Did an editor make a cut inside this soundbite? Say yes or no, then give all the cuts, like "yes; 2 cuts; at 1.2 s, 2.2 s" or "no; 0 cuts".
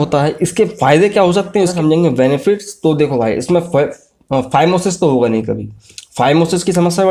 no; 0 cuts